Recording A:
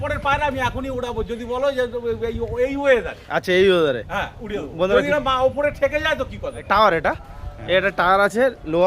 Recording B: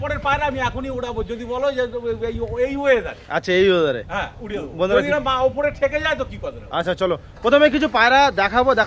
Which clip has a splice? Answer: A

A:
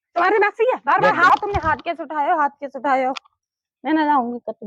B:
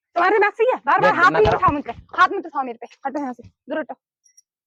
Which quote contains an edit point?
A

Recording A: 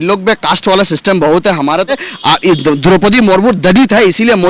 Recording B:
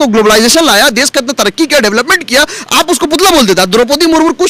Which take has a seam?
A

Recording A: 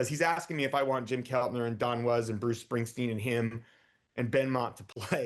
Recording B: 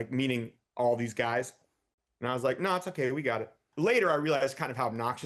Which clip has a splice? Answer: B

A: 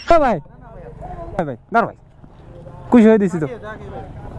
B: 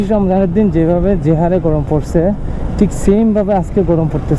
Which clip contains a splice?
A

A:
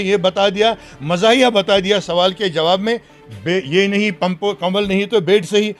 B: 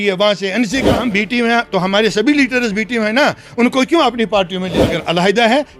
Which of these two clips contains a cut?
B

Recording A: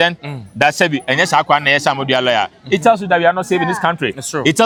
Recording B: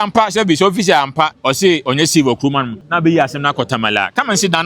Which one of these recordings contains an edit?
B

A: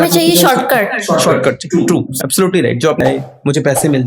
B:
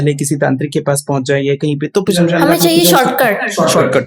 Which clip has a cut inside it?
A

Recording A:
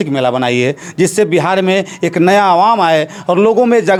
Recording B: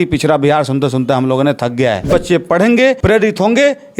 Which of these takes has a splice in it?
B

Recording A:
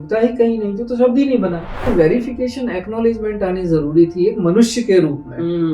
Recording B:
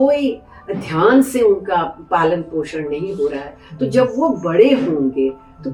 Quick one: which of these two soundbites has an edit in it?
A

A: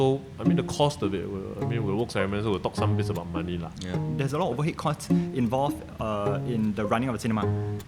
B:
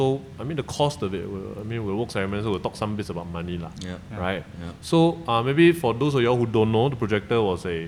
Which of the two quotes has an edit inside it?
A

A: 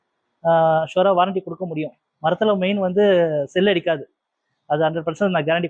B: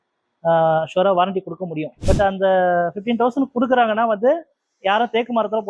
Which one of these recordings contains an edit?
B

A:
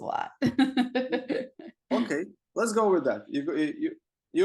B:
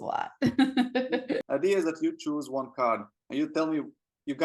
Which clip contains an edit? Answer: B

